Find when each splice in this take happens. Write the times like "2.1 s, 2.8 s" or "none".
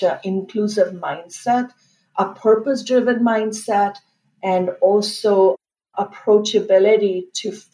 none